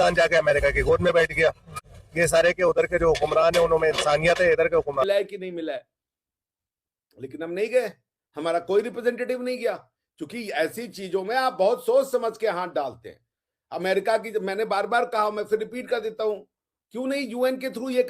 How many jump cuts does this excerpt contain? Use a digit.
1